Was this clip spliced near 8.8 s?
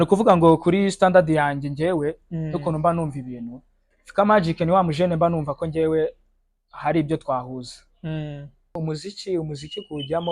yes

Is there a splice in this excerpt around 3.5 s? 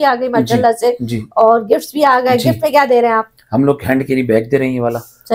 no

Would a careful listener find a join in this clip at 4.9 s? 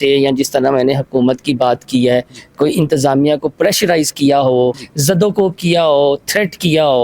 yes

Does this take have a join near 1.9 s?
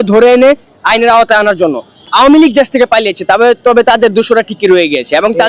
yes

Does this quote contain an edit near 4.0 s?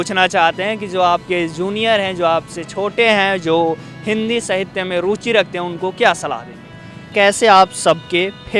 no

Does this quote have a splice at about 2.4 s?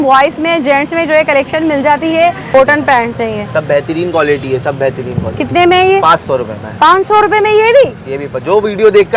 yes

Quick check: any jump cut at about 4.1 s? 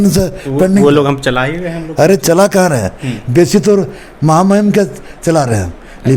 no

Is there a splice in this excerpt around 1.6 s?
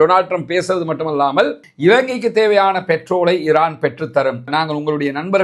yes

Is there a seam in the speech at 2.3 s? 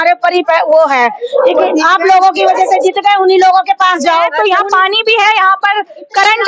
no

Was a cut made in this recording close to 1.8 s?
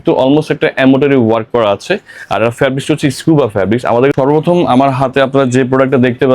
no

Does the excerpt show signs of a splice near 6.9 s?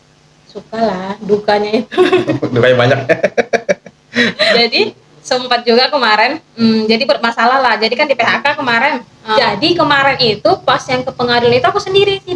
no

